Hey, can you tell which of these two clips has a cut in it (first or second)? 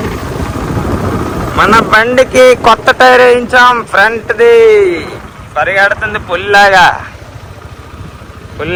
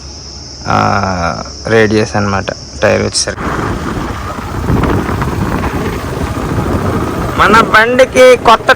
second